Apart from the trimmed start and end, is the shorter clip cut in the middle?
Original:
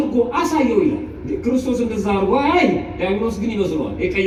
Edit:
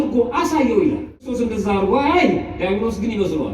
yes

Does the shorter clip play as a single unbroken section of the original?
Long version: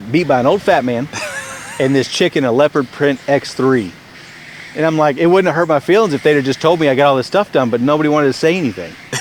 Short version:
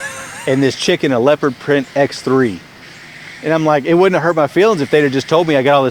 yes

